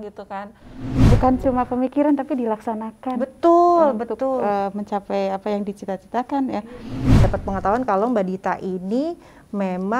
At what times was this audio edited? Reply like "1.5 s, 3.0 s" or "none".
1.1 s, 7.2 s